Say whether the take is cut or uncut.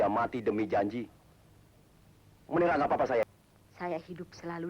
cut